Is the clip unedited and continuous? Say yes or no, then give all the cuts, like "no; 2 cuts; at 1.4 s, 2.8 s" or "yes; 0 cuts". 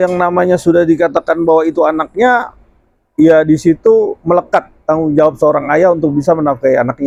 yes; 0 cuts